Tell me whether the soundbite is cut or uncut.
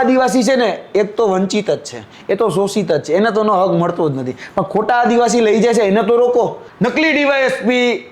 cut